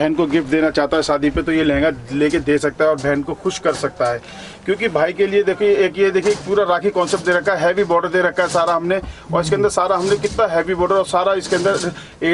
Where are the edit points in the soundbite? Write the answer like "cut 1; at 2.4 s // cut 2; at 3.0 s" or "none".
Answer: none